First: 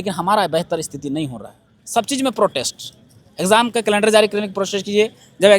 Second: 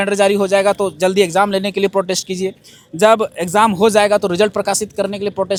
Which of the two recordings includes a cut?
first; 1 cut; at 1.7 s

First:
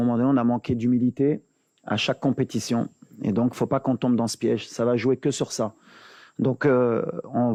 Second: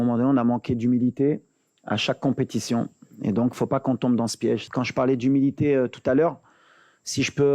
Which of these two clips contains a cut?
second; 1 cut; at 4.7 s

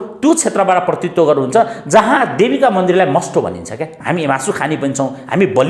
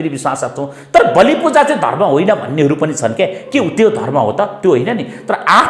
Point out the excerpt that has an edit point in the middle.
first; 1 cut; at 3.9 s

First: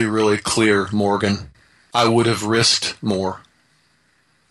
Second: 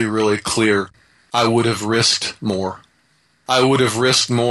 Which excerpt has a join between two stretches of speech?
second; 2 cuts; at 0.9 s, 3.4 s

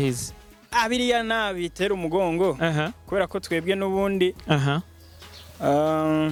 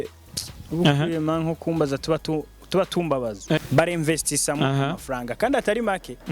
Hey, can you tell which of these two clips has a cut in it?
second; 1 cut; at 3.6 s

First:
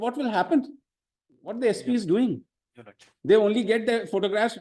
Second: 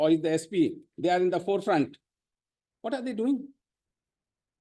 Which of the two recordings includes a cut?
first; 1 cut; at 1.5 s

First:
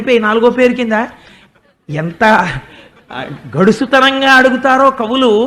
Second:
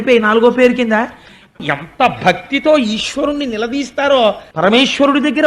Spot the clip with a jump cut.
second; 2 cuts; at 1.7 s, 4.5 s

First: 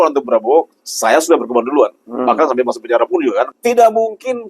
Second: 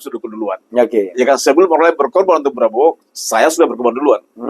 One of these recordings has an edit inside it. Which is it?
first; 1 cut; at 3.5 s

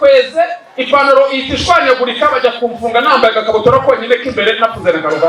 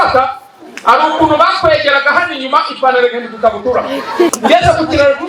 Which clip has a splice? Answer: second; 1 cut; at 4.3 s

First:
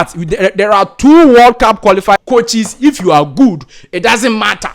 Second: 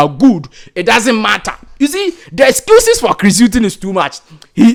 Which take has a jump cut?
first; 1 cut; at 2.2 s

